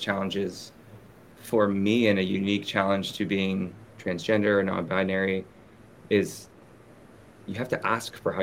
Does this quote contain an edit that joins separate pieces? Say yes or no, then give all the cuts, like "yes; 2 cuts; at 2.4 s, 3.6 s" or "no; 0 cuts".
yes; 1 cut; at 3.8 s